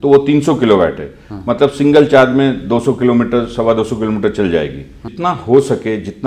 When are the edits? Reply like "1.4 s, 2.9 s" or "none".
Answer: 5.1 s